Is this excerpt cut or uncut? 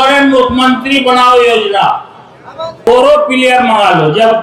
cut